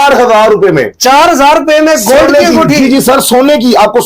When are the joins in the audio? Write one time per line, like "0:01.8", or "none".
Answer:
none